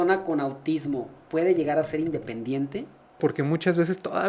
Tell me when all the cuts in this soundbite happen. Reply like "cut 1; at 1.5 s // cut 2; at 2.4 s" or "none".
cut 1; at 3.2 s